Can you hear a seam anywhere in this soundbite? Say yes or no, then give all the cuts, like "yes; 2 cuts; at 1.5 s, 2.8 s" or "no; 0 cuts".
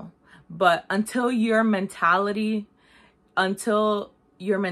no; 0 cuts